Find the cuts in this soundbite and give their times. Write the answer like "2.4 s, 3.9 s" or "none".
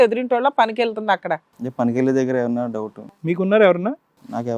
3.2 s